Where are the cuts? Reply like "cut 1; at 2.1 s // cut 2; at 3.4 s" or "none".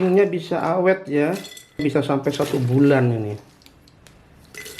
cut 1; at 1.8 s